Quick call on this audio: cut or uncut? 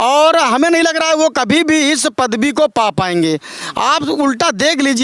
uncut